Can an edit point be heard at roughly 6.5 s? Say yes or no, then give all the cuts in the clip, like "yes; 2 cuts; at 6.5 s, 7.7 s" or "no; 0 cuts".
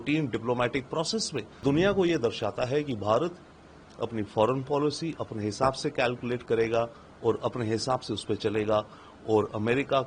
no; 1 cut; at 1.6 s